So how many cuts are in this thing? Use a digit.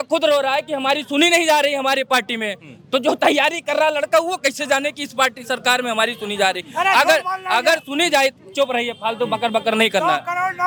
0